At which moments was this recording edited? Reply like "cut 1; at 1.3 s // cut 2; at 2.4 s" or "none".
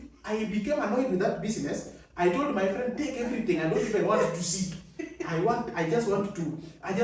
none